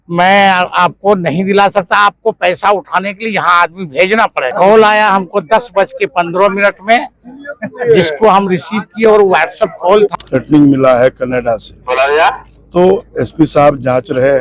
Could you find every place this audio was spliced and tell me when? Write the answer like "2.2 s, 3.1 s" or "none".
4.5 s, 10.1 s